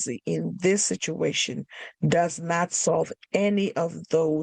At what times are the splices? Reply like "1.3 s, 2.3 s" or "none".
none